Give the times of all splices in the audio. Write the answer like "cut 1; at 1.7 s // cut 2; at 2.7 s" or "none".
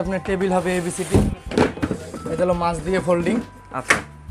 cut 1; at 1.3 s